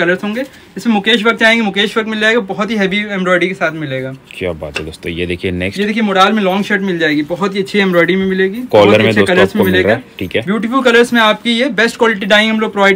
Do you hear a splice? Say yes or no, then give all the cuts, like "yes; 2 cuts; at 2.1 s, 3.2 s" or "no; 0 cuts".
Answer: no; 0 cuts